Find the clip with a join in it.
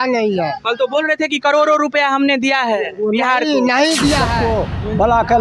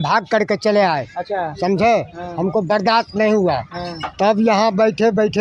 first; 1 cut; at 4.4 s

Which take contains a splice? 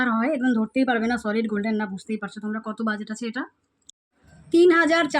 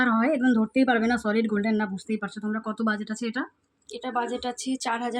first; 1 cut; at 3.9 s

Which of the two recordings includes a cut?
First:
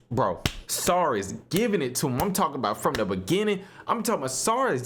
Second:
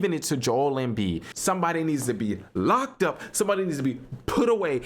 second; 1 cut; at 1.3 s

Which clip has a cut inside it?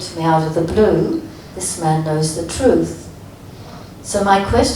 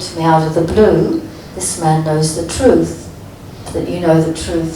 second; 1 cut; at 3.7 s

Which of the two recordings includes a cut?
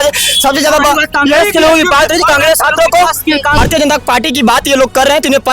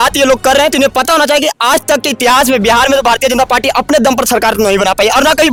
first; 1 cut; at 3.6 s

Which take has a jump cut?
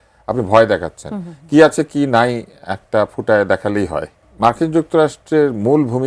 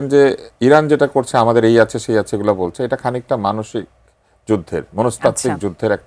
first; 1 cut; at 4.2 s

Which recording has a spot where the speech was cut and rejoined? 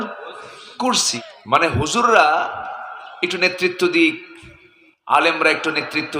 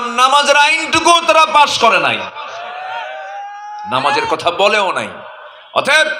first; 1 cut; at 1.1 s

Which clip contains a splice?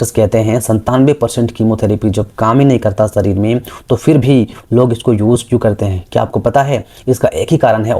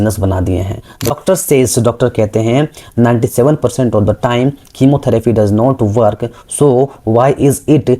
second; 1 cut; at 1.1 s

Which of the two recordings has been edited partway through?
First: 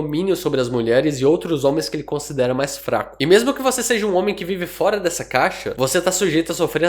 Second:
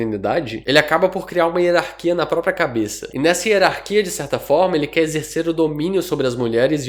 first; 1 cut; at 5.7 s

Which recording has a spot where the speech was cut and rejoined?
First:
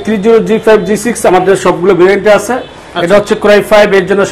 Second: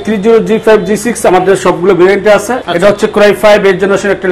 second; 1 cut; at 2.6 s

